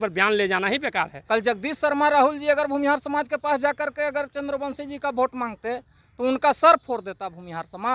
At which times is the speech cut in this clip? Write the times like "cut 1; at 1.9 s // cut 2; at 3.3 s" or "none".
cut 1; at 1.2 s